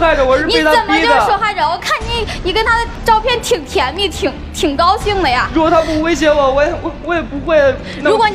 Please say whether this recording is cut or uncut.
uncut